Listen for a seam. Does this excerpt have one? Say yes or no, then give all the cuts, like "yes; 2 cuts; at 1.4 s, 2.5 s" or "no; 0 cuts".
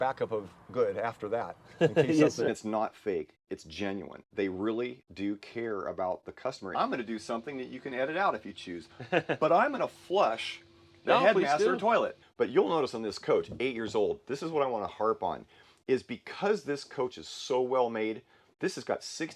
yes; 3 cuts; at 2.5 s, 6.6 s, 12.2 s